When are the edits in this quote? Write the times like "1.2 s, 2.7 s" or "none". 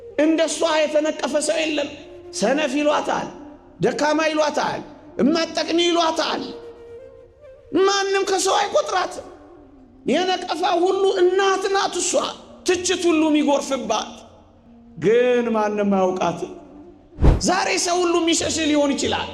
17.3 s